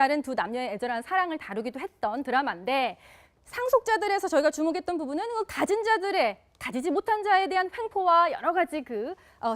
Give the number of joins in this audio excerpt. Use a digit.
1